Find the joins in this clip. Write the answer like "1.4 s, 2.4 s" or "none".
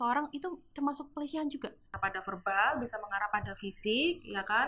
1.9 s